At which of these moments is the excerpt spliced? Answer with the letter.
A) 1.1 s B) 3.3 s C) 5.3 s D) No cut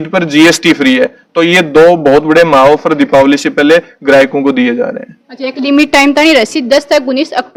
D